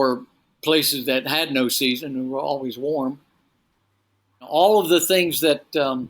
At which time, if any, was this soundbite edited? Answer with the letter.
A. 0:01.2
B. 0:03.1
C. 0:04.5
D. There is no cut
C